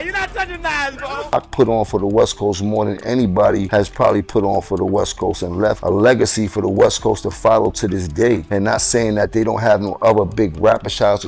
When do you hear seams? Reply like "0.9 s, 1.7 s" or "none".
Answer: 1.3 s, 3.6 s, 5.8 s, 8.4 s